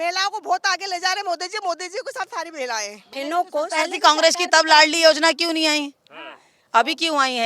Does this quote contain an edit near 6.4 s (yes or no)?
no